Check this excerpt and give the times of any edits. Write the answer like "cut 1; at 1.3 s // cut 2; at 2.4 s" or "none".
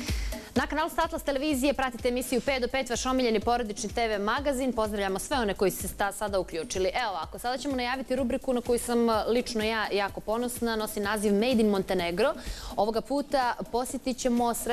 cut 1; at 2.0 s